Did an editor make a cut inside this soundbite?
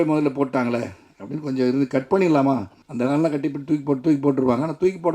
yes; 1 cut; at 2.8 s

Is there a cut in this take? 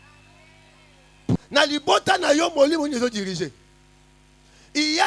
yes; 1 cut; at 1.4 s

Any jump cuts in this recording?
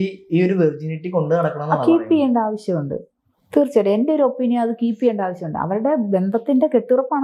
no; 0 cuts

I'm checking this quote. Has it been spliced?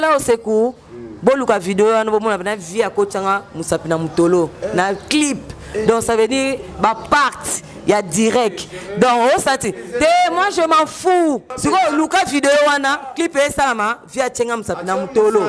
yes; 1 cut; at 11.5 s

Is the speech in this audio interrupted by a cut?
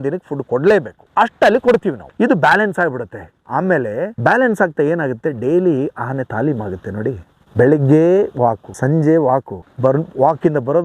no; 0 cuts

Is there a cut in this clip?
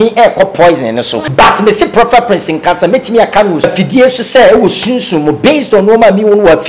yes; 2 cuts; at 1.2 s, 3.6 s

